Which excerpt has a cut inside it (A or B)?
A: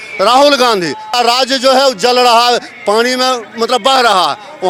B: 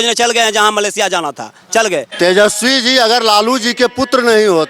B